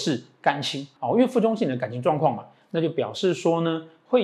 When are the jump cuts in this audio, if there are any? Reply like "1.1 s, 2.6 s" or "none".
0.9 s